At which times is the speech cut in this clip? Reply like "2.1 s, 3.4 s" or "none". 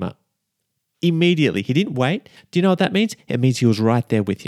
2.4 s